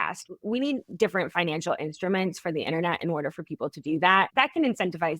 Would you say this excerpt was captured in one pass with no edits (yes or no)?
no